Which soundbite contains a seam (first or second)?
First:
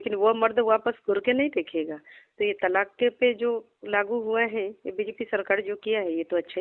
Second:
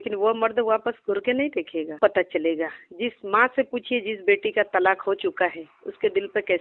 second